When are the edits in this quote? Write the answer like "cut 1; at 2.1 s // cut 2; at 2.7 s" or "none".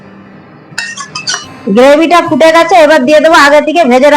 cut 1; at 1.5 s